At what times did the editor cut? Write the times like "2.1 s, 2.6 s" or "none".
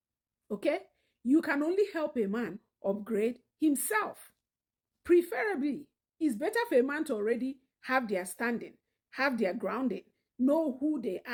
none